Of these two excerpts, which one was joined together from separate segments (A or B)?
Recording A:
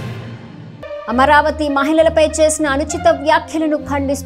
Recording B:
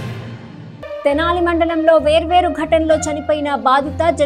A